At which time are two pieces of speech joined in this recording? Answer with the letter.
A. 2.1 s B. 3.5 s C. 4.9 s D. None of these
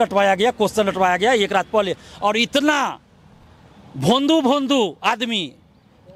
D